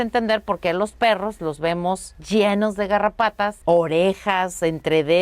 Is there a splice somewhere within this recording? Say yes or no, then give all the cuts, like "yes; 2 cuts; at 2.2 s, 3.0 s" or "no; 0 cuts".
yes; 2 cuts; at 2.1 s, 3.6 s